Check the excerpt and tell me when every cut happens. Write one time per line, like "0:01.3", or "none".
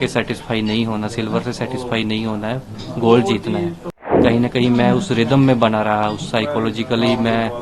0:04.2